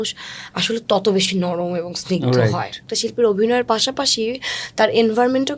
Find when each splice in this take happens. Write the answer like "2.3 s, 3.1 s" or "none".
2.9 s